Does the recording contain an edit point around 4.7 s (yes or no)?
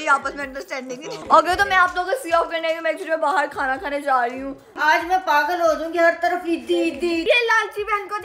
yes